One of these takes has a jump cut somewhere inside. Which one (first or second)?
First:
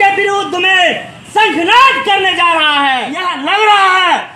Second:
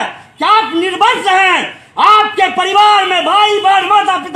first